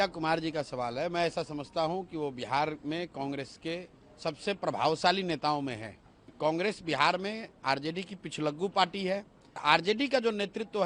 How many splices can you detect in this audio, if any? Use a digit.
2